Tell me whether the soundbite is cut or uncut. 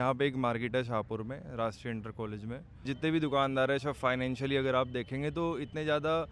uncut